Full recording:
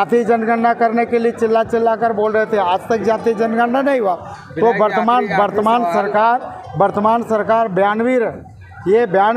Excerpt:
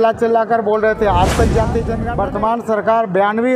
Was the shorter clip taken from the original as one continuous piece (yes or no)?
no